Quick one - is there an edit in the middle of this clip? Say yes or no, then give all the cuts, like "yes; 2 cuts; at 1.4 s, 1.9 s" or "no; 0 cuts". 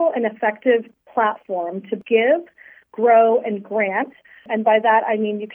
yes; 2 cuts; at 1.9 s, 4.5 s